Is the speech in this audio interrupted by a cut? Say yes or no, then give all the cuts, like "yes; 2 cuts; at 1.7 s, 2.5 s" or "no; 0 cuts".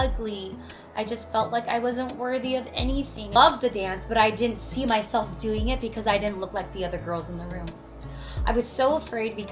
yes; 1 cut; at 3.4 s